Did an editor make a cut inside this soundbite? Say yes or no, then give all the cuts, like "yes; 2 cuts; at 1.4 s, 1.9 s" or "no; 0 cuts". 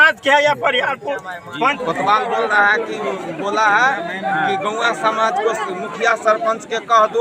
yes; 1 cut; at 1.8 s